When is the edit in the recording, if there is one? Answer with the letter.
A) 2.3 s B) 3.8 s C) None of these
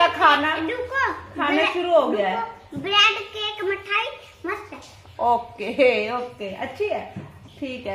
C